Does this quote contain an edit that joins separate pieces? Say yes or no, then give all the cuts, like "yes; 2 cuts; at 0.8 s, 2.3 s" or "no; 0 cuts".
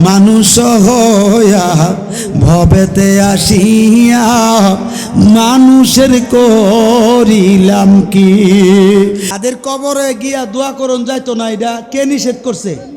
yes; 1 cut; at 9.3 s